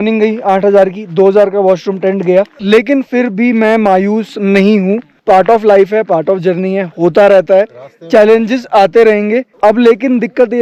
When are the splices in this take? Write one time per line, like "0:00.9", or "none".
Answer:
none